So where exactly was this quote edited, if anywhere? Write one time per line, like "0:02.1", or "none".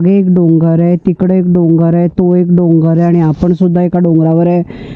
none